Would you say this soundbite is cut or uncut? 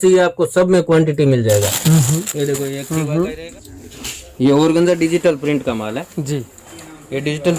cut